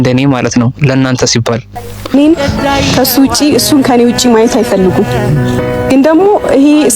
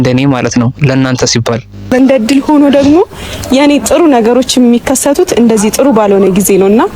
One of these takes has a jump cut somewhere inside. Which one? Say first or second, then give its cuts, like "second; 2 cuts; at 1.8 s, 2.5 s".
first; 1 cut; at 1.7 s